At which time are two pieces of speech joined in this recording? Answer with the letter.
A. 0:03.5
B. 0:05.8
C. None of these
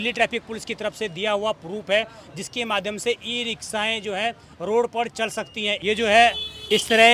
B